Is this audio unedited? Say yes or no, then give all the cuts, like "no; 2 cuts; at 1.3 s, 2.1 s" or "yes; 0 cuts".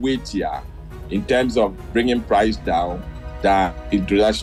yes; 0 cuts